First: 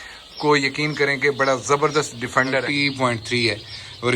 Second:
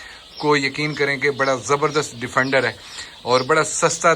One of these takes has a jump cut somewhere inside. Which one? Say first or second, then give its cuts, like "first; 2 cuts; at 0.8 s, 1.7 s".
first; 1 cut; at 2.7 s